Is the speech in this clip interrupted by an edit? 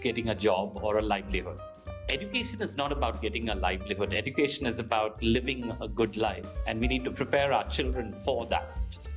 no; 0 cuts

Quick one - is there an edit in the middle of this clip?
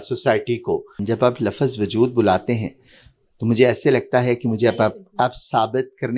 yes; 1 cut; at 0.9 s

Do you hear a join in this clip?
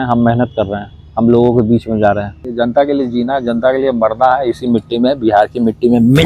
yes; 1 cut; at 2.4 s

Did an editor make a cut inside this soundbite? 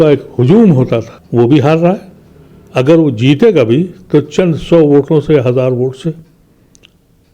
no; 0 cuts

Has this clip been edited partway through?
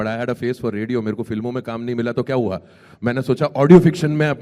no; 0 cuts

